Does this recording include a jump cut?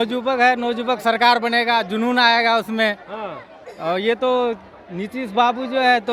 no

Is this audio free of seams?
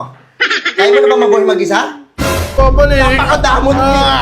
no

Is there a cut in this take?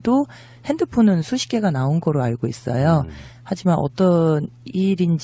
yes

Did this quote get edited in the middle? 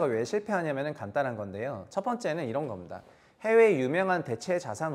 no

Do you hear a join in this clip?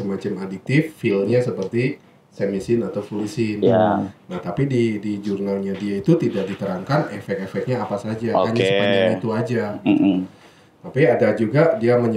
no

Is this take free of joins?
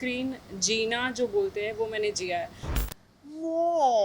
no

